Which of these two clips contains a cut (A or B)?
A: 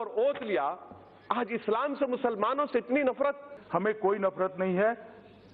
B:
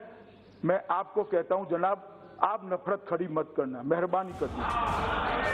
A